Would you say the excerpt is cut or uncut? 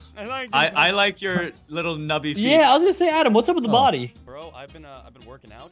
cut